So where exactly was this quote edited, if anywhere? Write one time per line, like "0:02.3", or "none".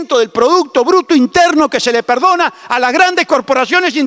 none